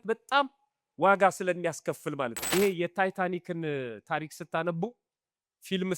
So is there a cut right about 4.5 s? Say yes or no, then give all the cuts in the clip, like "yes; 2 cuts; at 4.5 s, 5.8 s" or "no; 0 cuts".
no; 1 cut; at 2.4 s